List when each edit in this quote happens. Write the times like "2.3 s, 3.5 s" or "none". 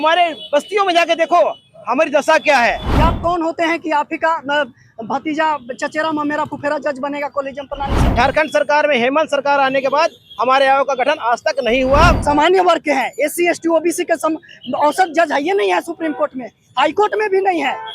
2.9 s, 8.0 s, 12.2 s